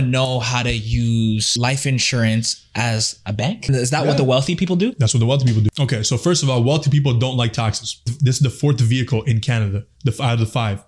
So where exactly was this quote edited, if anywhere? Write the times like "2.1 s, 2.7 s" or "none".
1.5 s, 3.7 s, 5.7 s, 8.1 s